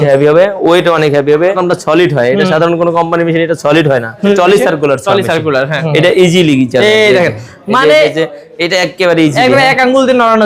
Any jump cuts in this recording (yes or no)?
yes